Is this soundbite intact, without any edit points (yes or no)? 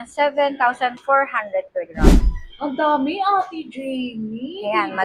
no